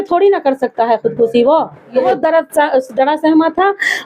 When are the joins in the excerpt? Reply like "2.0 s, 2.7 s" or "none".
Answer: 2.0 s